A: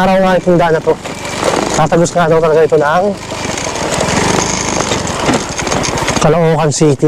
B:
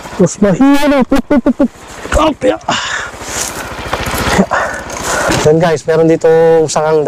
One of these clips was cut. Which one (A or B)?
B